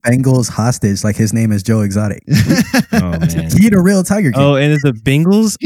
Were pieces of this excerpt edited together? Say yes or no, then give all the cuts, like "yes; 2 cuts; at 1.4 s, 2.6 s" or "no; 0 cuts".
no; 0 cuts